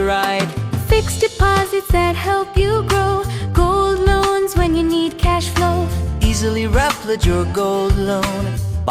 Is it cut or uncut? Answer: uncut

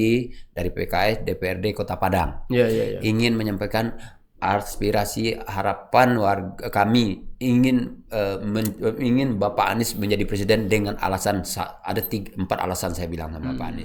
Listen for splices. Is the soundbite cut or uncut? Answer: uncut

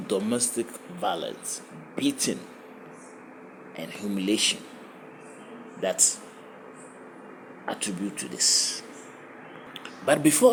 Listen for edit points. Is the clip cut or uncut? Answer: uncut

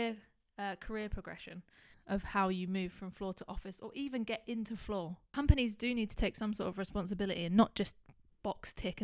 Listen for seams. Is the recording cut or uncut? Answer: cut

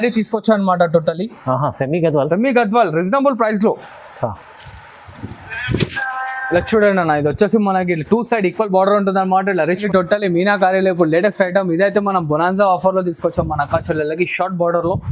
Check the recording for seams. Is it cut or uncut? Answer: cut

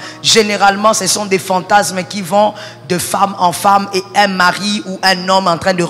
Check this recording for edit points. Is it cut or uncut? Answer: uncut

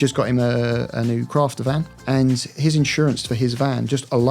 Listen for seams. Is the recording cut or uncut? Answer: cut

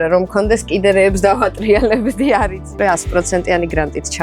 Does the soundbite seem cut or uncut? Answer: cut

